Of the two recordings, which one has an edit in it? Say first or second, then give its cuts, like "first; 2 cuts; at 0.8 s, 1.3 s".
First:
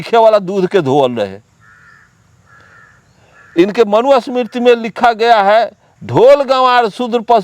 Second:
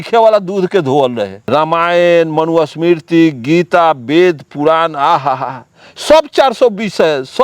second; 1 cut; at 1.4 s